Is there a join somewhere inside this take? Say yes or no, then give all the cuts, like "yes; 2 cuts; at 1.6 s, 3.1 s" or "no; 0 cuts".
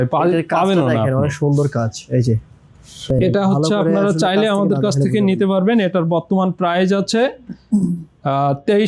no; 0 cuts